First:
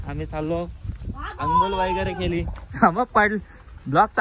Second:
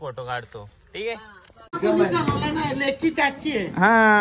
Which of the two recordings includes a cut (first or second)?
second